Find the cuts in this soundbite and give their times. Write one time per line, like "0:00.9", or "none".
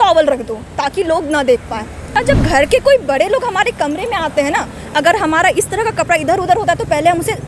0:02.1